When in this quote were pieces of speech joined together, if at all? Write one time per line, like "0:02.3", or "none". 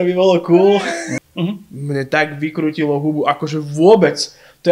0:01.1